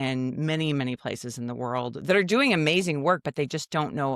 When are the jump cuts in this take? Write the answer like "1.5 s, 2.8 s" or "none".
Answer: none